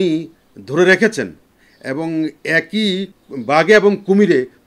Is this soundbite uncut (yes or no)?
no